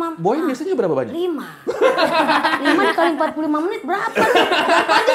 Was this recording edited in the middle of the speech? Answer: no; 0 cuts

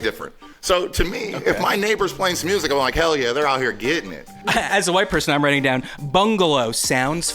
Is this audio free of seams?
no; 1 cut; at 4.5 s

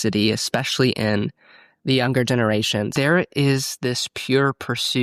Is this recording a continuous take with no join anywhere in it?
no; 1 cut; at 2.9 s

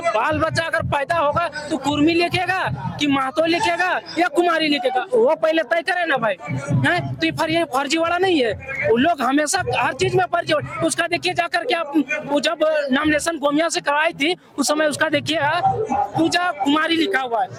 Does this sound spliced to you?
no; 0 cuts

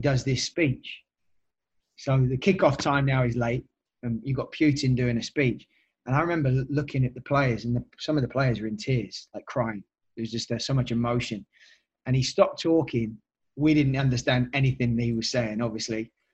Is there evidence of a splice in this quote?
no; 0 cuts

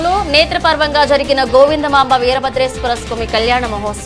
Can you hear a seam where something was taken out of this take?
no; 0 cuts

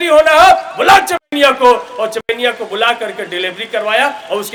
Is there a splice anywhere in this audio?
no; 0 cuts

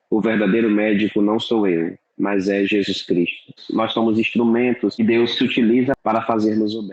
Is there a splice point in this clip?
yes; 3 cuts; at 3.6 s, 5.0 s, 6.0 s

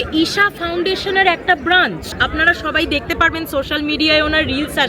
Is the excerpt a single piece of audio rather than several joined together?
no; 1 cut; at 2.2 s

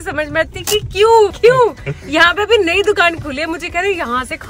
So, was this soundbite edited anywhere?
no; 0 cuts

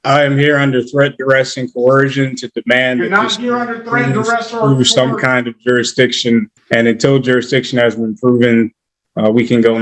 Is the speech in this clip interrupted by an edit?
yes; 1 cut; at 6.6 s

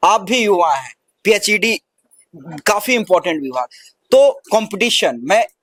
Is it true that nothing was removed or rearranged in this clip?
yes; 0 cuts

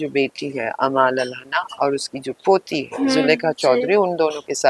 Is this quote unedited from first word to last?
yes; 0 cuts

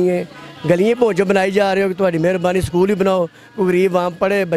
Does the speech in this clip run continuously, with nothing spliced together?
yes; 0 cuts

